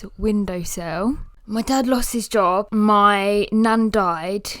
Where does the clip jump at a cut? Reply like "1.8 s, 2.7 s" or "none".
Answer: 1.3 s, 2.7 s